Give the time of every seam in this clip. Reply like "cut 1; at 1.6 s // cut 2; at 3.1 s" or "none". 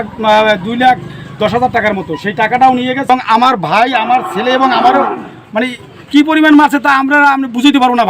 cut 1; at 3.1 s

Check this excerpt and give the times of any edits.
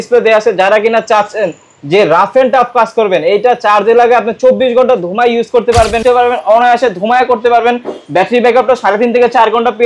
cut 1; at 6.0 s

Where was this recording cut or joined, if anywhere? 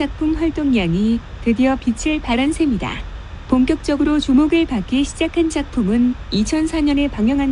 none

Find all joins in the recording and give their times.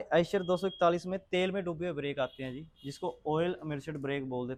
none

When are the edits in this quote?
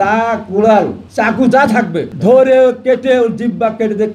cut 1; at 1.3 s // cut 2; at 2.1 s

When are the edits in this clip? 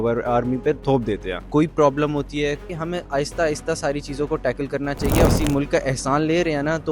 cut 1; at 1.1 s // cut 2; at 2.7 s // cut 3; at 5.3 s

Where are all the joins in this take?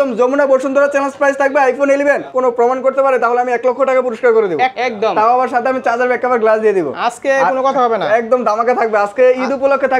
cut 1; at 2.3 s // cut 2; at 4.7 s

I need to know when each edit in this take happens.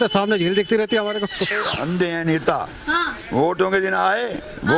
cut 1; at 1.6 s

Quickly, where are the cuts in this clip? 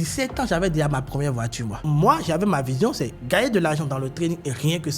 cut 1; at 1.8 s

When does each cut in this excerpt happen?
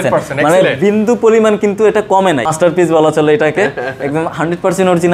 cut 1; at 2.5 s

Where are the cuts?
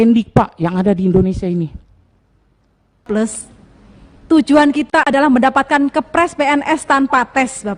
cut 1; at 3.0 s

